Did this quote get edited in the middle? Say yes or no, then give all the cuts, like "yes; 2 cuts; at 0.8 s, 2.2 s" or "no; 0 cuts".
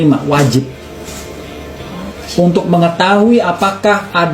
no; 0 cuts